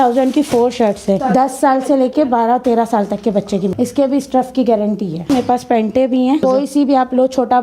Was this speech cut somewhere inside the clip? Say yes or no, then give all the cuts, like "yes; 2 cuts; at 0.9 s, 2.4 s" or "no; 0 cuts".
yes; 4 cuts; at 1.2 s, 3.7 s, 5.3 s, 6.4 s